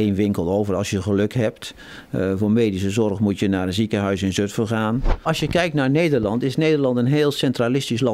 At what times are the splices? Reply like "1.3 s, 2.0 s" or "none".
5.2 s